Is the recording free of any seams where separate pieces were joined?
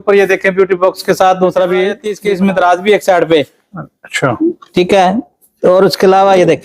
no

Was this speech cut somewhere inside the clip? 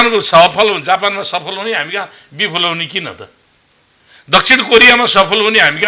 no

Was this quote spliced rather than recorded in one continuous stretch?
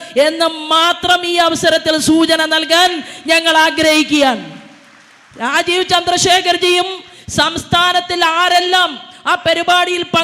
no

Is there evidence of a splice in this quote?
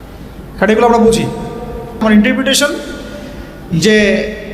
yes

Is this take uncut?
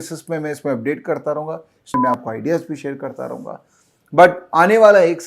no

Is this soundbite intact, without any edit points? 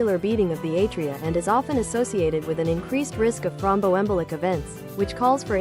yes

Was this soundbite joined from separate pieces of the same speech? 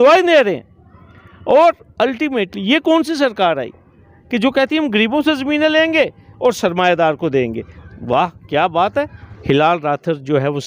yes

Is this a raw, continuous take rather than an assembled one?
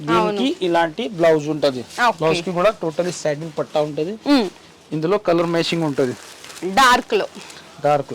yes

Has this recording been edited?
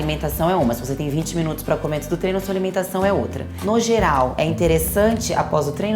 yes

